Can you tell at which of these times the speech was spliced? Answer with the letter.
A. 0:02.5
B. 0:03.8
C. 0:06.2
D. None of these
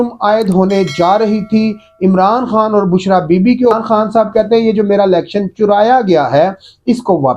B